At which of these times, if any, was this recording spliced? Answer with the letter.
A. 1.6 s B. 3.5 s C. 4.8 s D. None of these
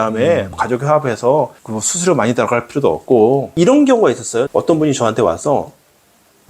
B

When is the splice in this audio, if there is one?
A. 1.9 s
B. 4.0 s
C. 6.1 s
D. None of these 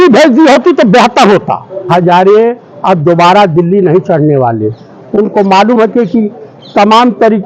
A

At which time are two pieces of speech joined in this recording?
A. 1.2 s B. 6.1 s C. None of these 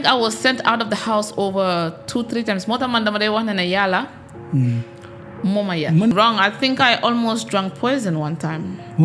B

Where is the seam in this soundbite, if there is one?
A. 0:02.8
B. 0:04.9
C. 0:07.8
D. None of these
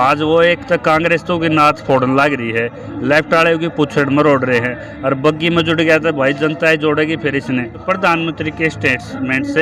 C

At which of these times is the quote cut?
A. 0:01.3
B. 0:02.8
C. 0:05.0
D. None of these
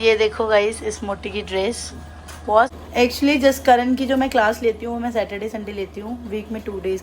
B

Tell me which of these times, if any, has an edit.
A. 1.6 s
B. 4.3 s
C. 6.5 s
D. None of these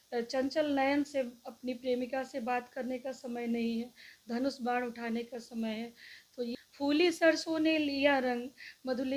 C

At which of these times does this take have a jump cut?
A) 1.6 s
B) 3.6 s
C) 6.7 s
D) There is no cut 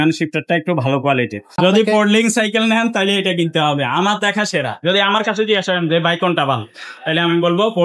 A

